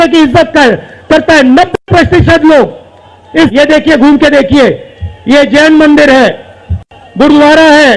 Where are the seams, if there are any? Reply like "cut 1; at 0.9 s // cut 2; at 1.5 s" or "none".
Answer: cut 1; at 3.5 s